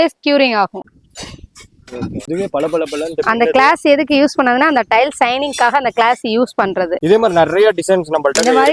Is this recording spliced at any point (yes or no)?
yes